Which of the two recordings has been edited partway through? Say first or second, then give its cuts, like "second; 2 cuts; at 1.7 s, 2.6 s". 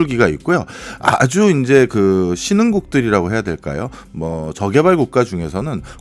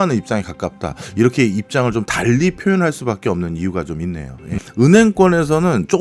second; 1 cut; at 4.6 s